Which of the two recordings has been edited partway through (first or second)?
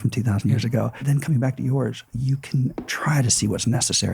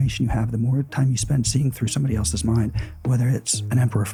first